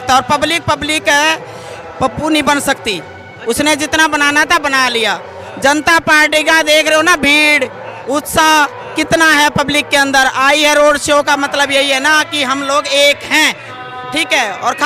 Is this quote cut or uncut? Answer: cut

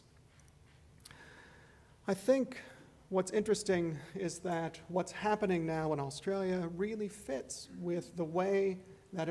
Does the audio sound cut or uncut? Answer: uncut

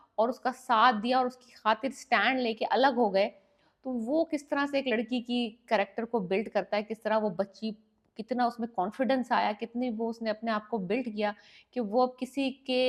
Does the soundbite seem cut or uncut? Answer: uncut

